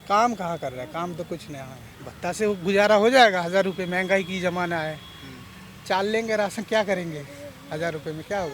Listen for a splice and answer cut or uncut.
uncut